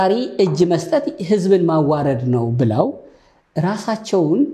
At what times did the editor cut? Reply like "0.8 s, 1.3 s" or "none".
none